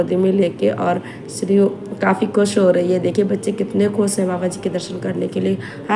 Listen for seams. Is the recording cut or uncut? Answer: uncut